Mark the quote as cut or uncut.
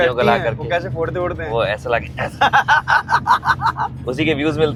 uncut